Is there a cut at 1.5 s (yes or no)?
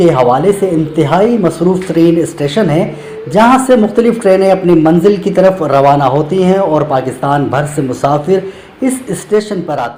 no